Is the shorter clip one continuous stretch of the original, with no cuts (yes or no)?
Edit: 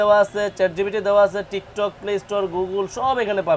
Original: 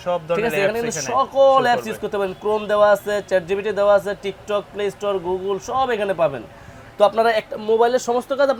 yes